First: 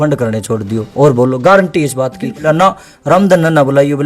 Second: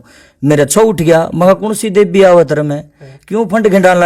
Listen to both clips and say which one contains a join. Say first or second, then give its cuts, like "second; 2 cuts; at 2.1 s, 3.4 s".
first; 1 cut; at 2.4 s